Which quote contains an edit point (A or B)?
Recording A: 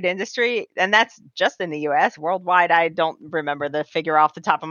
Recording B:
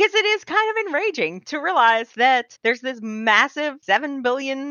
B